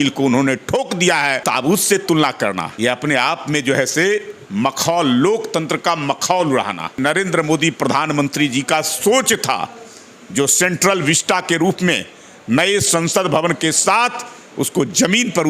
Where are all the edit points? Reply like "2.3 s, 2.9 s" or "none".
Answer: 1.4 s, 2.7 s, 7.0 s